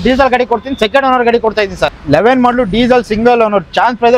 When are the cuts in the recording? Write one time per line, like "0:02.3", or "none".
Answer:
0:01.9